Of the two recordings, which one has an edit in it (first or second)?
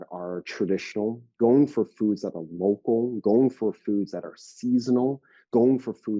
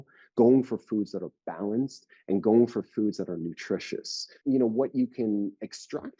second